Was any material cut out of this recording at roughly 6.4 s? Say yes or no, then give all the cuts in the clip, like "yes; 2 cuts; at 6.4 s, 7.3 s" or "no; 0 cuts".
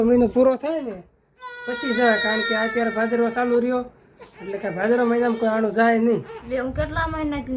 yes; 1 cut; at 6.4 s